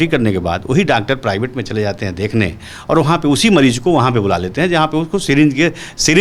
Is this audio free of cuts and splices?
yes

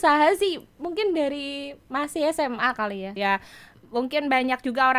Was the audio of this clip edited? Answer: yes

